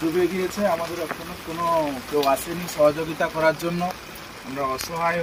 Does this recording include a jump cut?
no; 0 cuts

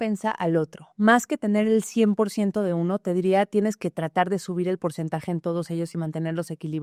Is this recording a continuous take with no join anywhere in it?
yes; 0 cuts

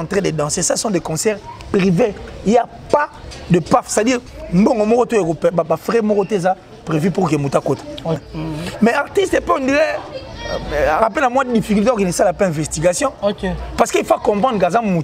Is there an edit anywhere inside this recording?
yes; 1 cut; at 8.3 s

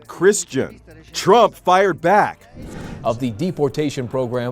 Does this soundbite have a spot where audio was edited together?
yes; 1 cut; at 2.8 s

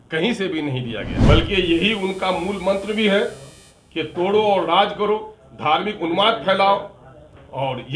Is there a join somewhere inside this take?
yes; 1 cut; at 1.2 s

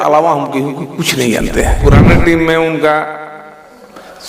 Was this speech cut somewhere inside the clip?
yes; 1 cut; at 1.8 s

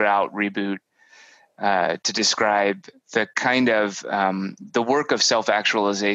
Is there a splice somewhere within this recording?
no; 0 cuts

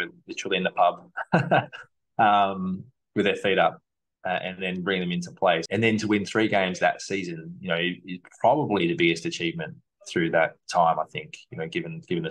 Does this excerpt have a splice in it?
yes; 1 cut; at 5.6 s

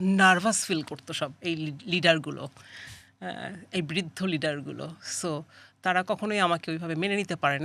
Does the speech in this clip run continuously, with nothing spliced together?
yes; 0 cuts

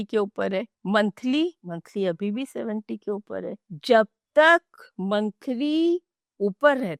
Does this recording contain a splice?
no; 0 cuts

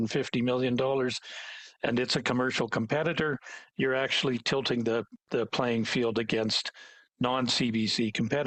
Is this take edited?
no; 0 cuts

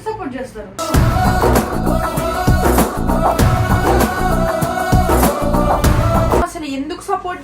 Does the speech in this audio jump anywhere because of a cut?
yes; 1 cut; at 6.4 s

